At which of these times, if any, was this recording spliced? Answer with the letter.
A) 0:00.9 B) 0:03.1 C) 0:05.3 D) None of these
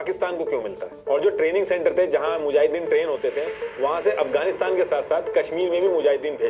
A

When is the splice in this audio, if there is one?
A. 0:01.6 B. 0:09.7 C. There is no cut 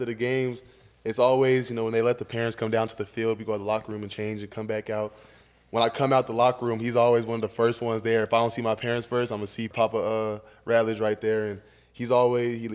B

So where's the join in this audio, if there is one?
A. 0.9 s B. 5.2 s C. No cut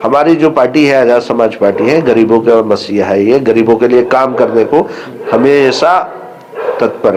C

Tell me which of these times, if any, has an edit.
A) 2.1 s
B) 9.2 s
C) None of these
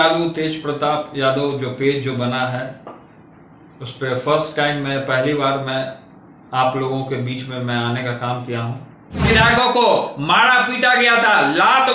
B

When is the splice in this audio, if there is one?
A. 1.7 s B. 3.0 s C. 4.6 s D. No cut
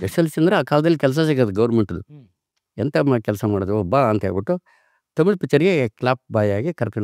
D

